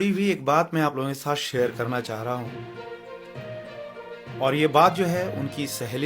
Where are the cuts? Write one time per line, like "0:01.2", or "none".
0:02.8
0:04.4